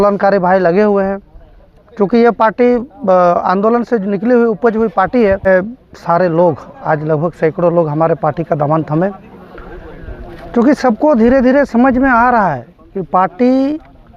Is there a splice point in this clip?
yes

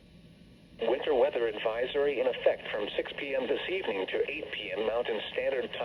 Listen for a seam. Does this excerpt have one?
no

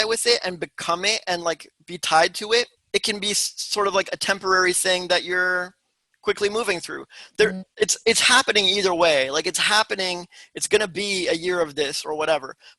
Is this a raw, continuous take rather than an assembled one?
no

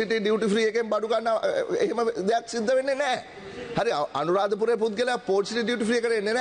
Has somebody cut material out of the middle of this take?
no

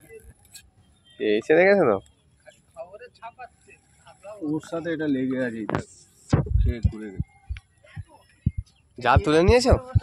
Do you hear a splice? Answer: no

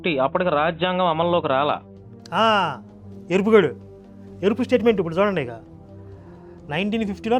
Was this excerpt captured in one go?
yes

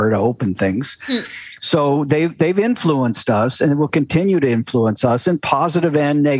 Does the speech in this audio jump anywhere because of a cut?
no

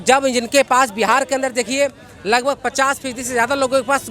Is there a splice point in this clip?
no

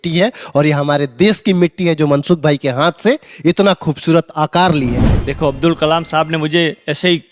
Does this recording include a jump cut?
yes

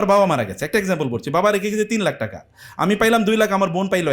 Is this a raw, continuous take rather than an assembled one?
yes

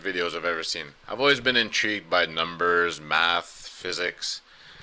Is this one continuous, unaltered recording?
no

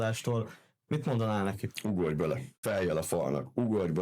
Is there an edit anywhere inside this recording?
yes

